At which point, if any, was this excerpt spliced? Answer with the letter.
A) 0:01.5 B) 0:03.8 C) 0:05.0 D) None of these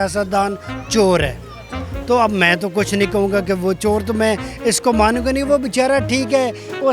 D